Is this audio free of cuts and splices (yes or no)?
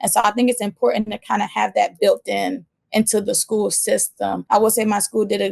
no